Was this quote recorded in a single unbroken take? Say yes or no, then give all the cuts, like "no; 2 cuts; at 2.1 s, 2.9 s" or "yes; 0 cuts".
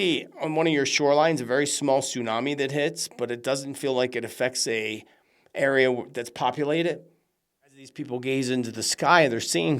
no; 1 cut; at 7.9 s